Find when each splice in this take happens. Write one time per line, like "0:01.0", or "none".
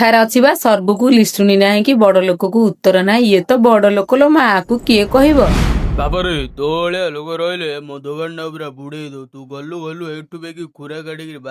0:05.8